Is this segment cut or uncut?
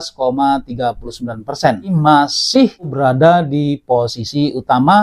cut